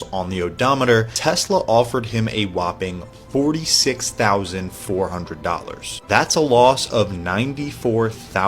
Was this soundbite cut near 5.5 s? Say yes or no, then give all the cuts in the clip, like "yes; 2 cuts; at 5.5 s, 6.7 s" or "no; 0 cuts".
no; 1 cut; at 1.1 s